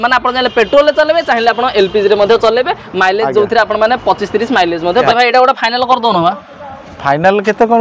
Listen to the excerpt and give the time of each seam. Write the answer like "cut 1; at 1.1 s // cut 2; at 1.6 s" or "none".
cut 1; at 5.1 s